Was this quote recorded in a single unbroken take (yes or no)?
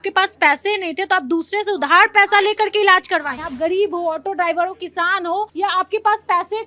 no